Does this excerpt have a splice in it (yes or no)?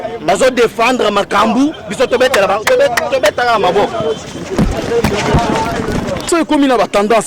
yes